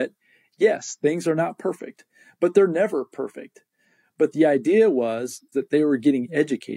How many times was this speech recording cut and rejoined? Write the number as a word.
one